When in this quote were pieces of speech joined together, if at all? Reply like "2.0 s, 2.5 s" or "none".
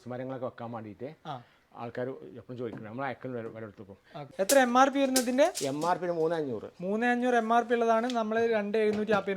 4.2 s

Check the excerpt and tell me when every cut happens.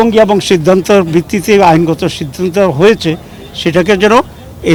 none

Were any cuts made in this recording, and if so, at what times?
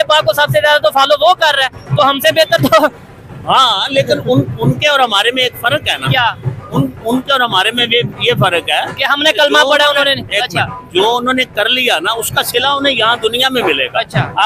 none

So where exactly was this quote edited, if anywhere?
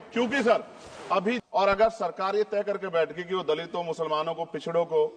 1.4 s

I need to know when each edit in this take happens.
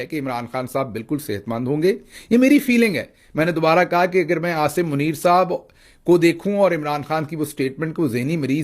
2.1 s

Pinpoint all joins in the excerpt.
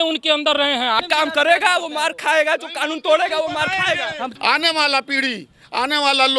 1.0 s, 4.3 s

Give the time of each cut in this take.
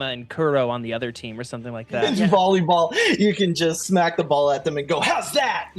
1.9 s, 3.8 s

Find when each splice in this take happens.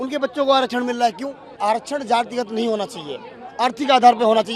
1.5 s

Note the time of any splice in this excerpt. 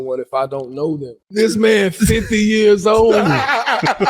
1.1 s

